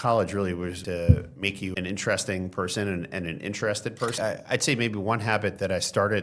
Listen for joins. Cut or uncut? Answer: cut